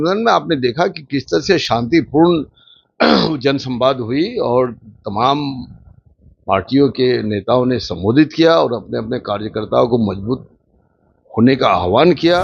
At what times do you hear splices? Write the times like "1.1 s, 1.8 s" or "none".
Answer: none